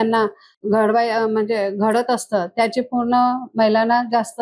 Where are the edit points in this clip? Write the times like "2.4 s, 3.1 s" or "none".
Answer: none